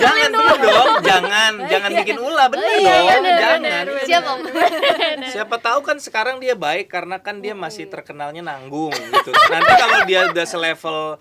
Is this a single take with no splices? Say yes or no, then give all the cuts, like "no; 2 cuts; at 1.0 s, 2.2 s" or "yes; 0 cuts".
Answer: yes; 0 cuts